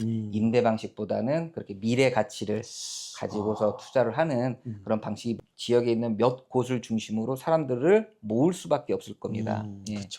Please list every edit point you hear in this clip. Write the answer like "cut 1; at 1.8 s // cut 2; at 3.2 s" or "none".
cut 1; at 5.4 s